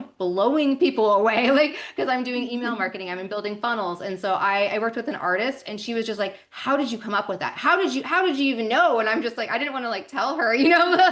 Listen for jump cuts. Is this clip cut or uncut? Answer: uncut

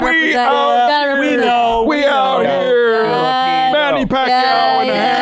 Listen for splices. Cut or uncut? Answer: uncut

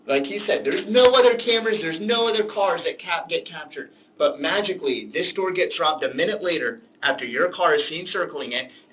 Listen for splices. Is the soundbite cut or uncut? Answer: uncut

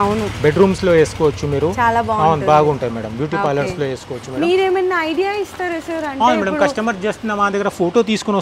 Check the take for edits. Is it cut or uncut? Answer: uncut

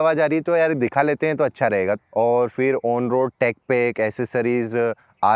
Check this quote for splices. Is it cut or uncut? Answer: cut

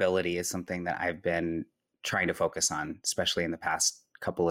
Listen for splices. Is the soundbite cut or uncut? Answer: uncut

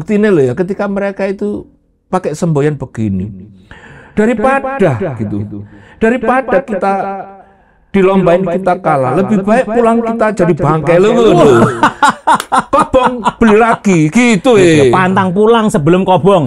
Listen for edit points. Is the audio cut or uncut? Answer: uncut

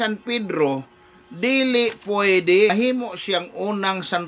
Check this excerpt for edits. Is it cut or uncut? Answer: cut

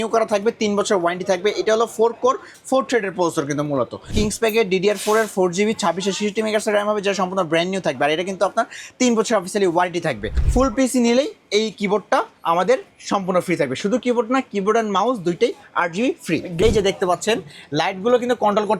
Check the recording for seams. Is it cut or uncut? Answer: cut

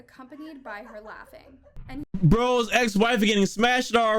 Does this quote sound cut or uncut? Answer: cut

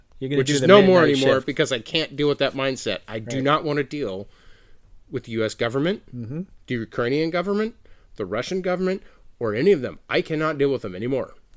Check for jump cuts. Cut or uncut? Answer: uncut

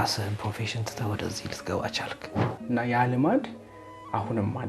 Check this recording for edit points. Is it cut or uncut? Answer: cut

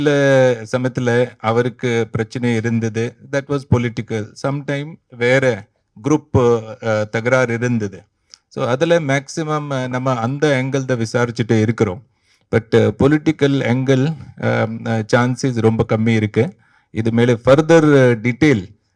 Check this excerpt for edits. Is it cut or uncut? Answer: uncut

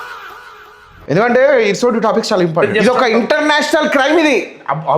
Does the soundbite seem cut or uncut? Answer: cut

